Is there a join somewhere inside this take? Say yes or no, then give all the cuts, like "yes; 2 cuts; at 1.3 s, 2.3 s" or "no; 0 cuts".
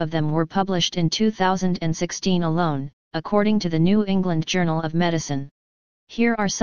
yes; 1 cut; at 3.7 s